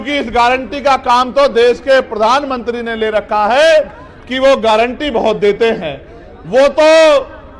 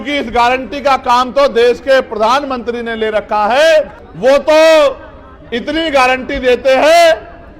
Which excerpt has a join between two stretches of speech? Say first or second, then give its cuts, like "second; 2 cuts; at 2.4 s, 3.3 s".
second; 1 cut; at 4.0 s